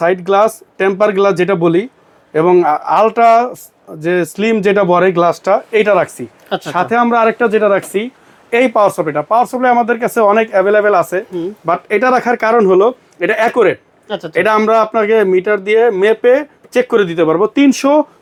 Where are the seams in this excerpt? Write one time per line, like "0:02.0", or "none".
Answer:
none